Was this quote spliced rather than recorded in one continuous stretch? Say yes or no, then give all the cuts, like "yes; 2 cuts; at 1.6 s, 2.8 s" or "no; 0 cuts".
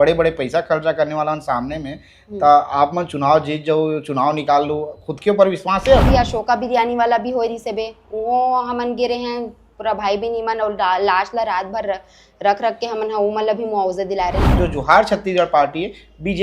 yes; 2 cuts; at 6.1 s, 14.4 s